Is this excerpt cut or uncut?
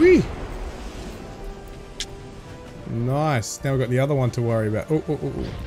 uncut